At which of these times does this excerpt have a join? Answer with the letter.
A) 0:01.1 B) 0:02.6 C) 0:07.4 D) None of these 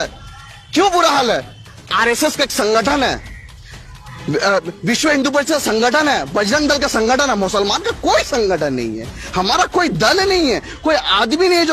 D